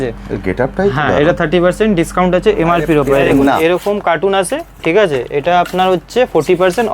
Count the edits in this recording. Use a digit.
1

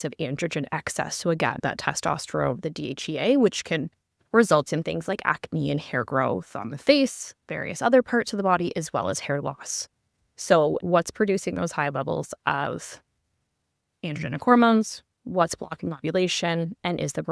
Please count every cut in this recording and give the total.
1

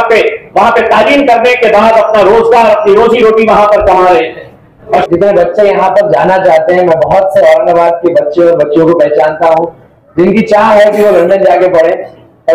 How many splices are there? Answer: 1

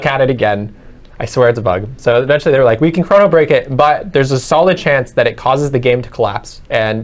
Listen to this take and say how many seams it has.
0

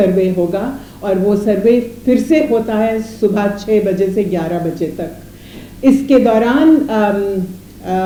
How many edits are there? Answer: 0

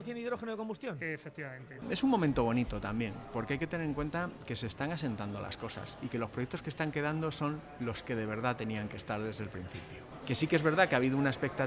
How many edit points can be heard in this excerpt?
2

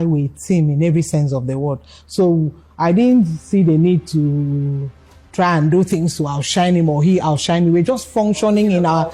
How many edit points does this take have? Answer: 0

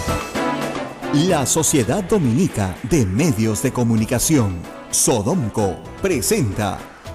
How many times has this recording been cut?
1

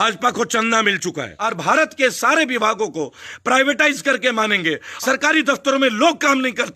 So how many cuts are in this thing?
2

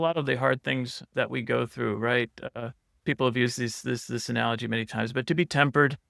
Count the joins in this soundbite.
2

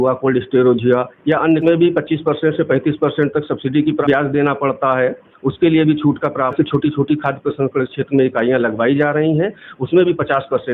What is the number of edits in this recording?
3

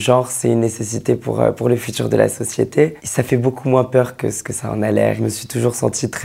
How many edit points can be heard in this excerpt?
1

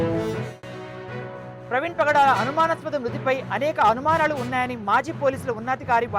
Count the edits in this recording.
1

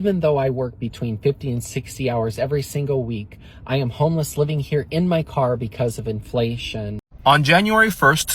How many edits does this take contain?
1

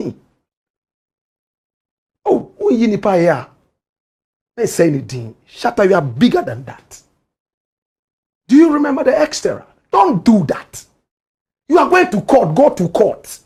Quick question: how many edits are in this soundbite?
0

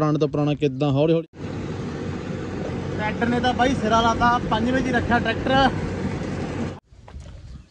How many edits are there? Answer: 2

